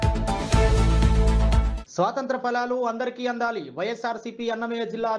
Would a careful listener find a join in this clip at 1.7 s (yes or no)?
yes